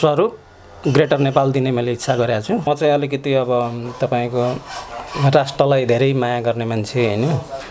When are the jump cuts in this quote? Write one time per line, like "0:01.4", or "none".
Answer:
0:02.6